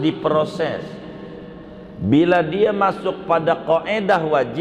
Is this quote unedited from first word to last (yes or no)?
yes